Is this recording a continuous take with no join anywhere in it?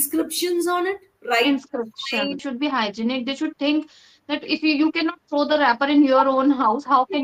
no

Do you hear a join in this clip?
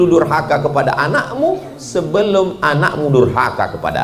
no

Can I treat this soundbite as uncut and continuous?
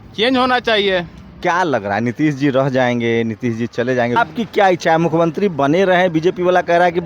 no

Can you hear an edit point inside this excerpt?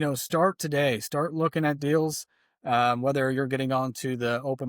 no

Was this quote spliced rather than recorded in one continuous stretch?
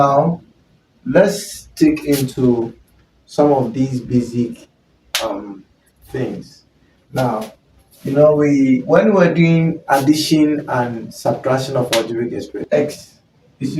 yes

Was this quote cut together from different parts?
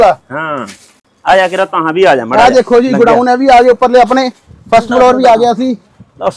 no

